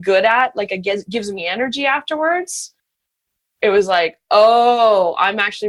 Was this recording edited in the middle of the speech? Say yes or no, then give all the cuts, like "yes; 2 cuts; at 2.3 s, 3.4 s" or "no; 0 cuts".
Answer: no; 0 cuts